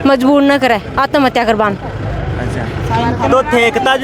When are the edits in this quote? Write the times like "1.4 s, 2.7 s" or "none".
none